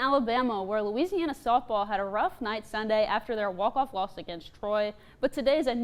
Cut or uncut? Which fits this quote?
uncut